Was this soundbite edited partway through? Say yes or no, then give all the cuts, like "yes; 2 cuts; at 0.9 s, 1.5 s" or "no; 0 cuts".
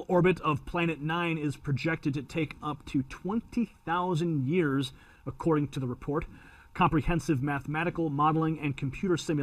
yes; 1 cut; at 2.1 s